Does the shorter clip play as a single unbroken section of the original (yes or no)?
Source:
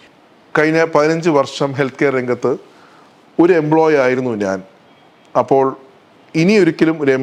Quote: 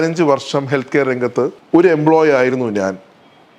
no